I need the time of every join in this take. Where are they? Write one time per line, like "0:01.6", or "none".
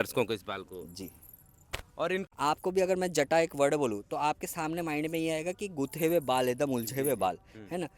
0:02.3